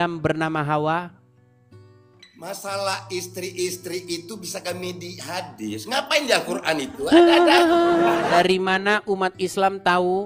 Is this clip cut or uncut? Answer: cut